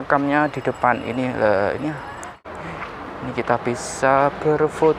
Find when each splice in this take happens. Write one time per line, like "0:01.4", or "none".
0:02.5

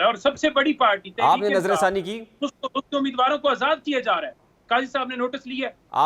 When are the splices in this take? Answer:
none

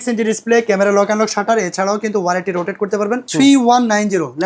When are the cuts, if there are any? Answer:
0:03.2

